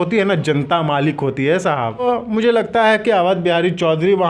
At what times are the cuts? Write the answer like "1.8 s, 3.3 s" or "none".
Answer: 2.0 s